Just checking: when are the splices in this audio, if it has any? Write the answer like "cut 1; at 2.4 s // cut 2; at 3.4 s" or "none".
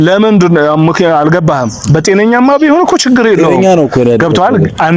none